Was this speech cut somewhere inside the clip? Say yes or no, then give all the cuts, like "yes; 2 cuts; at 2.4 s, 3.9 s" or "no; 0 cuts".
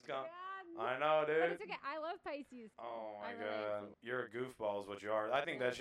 yes; 2 cuts; at 2.6 s, 3.9 s